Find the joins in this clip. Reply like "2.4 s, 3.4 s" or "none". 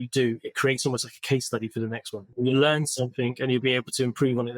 2.2 s